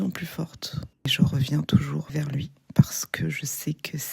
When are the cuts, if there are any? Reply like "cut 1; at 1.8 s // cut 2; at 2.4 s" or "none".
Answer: cut 1; at 1.1 s // cut 2; at 2.1 s